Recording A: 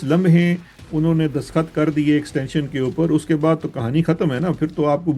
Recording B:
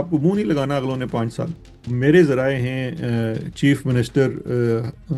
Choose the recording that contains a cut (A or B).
B